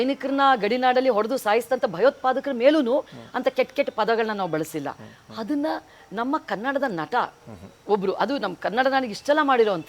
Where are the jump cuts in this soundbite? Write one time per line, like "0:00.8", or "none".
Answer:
none